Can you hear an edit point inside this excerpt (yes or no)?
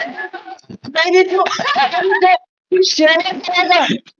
no